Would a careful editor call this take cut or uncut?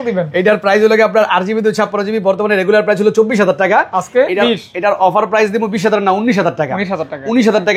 uncut